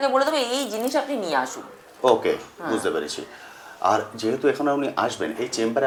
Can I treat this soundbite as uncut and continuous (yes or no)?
yes